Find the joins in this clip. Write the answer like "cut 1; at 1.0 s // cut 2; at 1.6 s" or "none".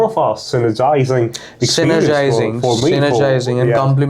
none